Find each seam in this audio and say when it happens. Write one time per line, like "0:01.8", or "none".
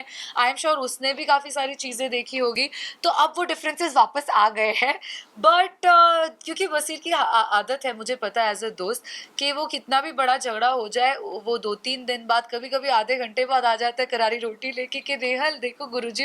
none